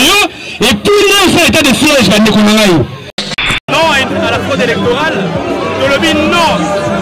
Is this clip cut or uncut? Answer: cut